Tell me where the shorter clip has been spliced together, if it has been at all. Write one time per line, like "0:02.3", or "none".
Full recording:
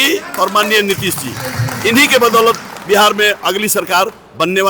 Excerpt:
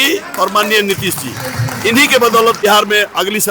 0:02.6